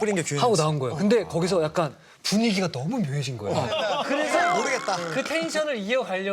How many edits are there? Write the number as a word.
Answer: one